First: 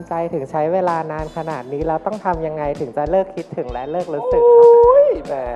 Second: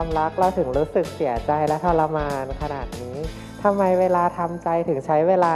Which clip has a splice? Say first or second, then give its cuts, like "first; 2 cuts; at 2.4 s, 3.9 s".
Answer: second; 1 cut; at 3.3 s